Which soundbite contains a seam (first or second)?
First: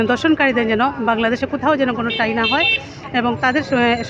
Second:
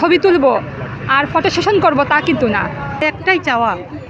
second